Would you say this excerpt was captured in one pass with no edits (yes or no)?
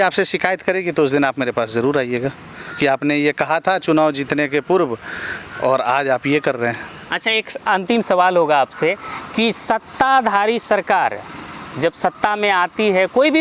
yes